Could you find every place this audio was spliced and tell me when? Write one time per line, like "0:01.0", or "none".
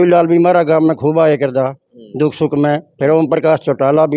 none